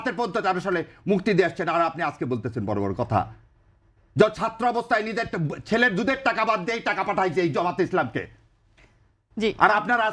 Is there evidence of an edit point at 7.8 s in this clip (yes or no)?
no